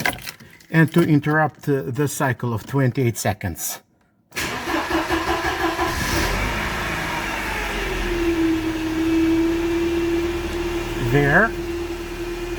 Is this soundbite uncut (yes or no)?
yes